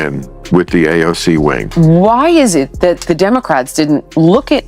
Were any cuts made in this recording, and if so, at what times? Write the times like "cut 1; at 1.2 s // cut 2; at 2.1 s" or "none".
cut 1; at 1.6 s